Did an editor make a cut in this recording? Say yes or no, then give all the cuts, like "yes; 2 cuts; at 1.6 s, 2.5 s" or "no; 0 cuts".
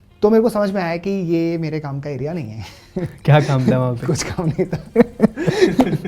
no; 0 cuts